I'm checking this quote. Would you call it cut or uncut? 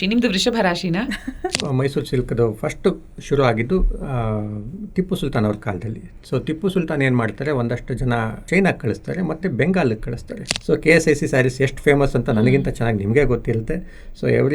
cut